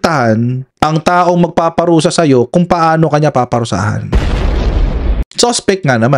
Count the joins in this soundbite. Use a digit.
1